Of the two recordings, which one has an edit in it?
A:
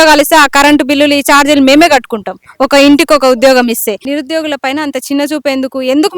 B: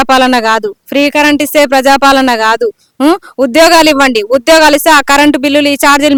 A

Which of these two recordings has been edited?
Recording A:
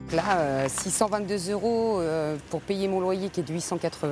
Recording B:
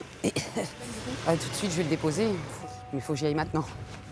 B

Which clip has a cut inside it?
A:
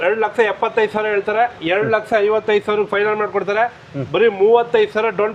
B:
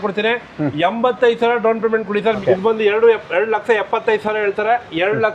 B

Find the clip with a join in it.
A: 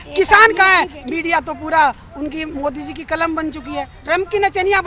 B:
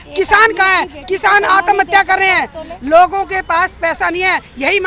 A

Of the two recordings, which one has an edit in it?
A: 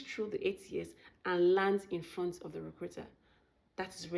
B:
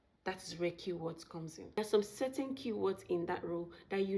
B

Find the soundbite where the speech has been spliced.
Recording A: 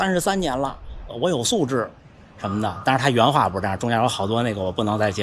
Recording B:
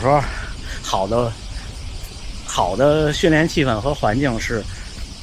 A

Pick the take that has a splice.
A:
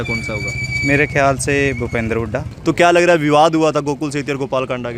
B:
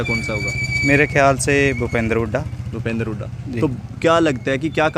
A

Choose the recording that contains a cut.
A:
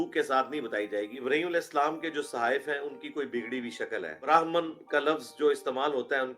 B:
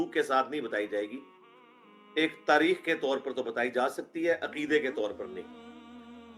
A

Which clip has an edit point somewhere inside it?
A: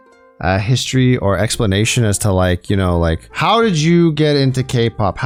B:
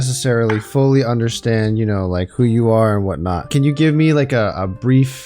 B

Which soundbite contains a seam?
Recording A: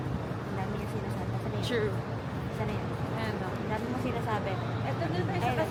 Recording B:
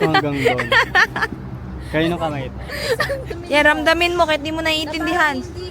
B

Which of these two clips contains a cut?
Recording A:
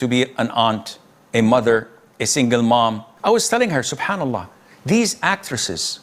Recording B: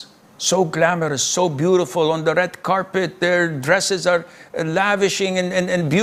A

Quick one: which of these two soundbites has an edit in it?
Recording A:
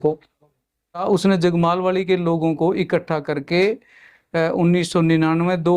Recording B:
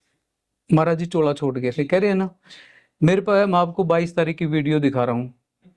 A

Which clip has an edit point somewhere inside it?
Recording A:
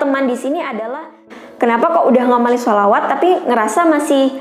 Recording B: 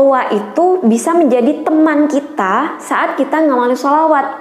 A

